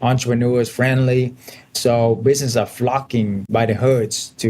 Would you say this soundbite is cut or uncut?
cut